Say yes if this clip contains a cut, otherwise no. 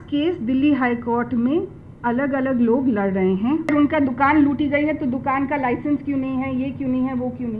yes